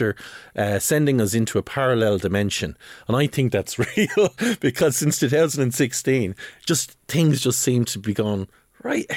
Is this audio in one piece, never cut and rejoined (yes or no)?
yes